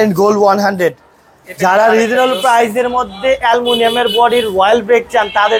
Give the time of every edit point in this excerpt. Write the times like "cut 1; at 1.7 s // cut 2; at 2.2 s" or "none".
none

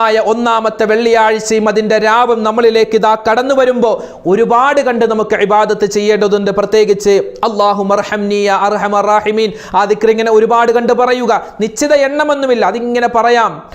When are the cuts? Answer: none

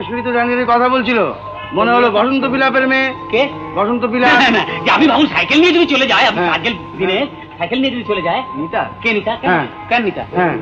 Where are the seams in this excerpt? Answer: none

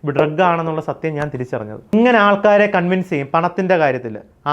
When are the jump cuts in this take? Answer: cut 1; at 1.9 s

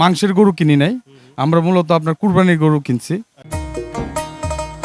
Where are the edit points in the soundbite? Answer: cut 1; at 3.6 s

